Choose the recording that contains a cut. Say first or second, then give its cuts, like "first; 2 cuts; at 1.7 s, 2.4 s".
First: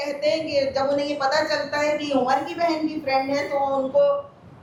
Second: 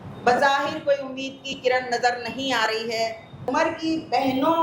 second; 1 cut; at 3.5 s